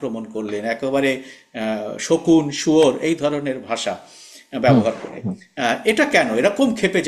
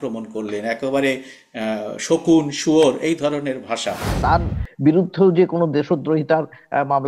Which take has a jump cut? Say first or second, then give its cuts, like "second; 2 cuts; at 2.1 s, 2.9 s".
second; 1 cut; at 4.1 s